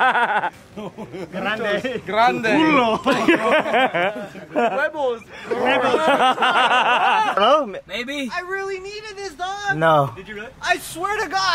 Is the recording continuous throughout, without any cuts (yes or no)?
no